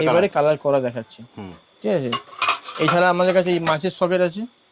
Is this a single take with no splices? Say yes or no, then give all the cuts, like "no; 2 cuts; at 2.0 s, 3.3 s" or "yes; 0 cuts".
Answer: yes; 0 cuts